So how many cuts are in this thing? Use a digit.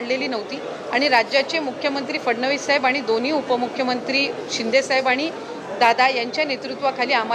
0